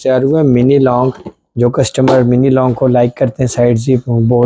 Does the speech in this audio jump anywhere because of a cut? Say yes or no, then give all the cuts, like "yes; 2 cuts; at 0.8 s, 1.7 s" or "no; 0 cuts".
no; 0 cuts